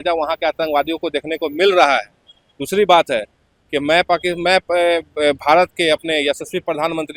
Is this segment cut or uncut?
uncut